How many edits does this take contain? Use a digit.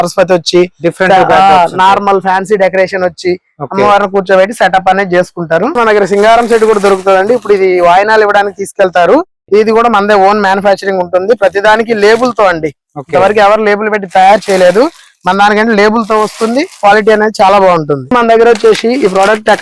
2